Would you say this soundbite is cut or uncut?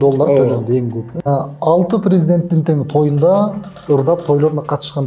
cut